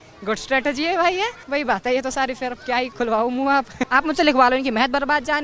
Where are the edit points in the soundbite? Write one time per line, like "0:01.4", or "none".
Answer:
0:01.4
0:03.8